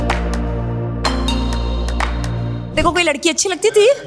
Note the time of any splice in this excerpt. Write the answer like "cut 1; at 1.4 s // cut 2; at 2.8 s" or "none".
cut 1; at 2.7 s

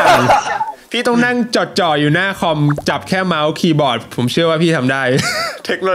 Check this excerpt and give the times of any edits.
none

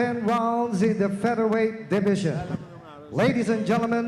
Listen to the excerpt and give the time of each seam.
none

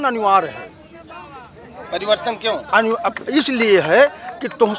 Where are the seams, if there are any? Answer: none

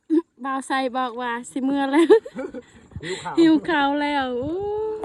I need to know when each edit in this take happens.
none

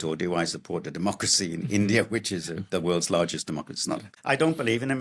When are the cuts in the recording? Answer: cut 1; at 4.1 s

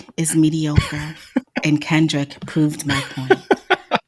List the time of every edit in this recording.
none

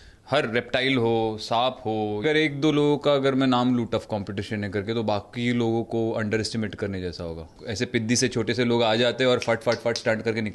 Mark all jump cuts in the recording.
cut 1; at 2.2 s // cut 2; at 7.6 s

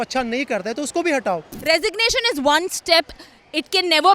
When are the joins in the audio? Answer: cut 1; at 1.5 s

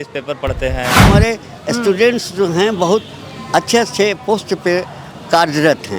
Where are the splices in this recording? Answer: cut 1; at 1.0 s

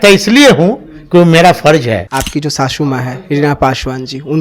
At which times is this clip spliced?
cut 1; at 2.1 s

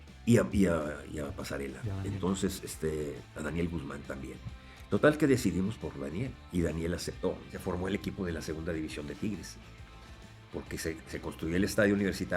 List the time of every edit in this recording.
cut 1; at 7.5 s

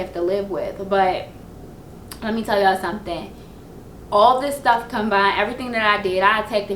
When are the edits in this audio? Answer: none

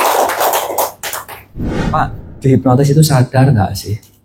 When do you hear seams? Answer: cut 1; at 1.8 s

